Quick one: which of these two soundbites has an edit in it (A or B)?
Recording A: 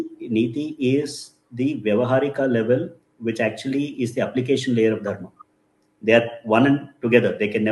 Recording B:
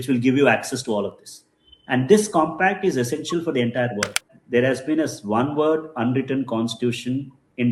B